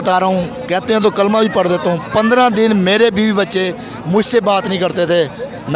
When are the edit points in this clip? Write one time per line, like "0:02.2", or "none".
none